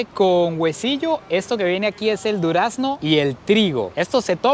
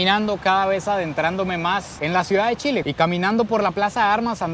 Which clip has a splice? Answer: second; 1 cut; at 2.8 s

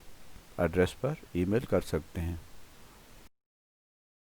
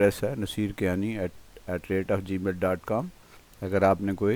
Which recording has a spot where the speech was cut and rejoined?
first; 1 cut; at 1.9 s

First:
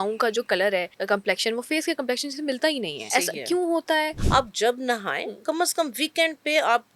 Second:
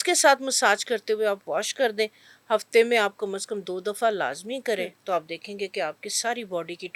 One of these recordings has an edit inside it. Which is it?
first; 3 cuts; at 0.9 s, 3.1 s, 4.2 s

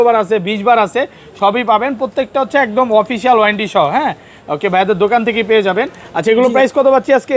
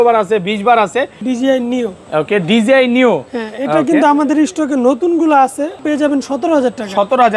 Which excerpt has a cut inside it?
second; 2 cuts; at 1.2 s, 5.8 s

